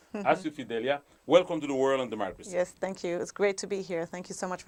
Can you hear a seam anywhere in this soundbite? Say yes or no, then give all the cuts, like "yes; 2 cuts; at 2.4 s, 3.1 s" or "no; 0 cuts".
no; 0 cuts